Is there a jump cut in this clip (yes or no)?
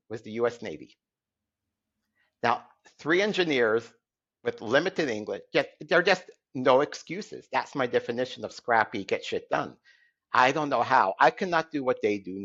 no